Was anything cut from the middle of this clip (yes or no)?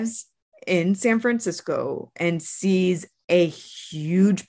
no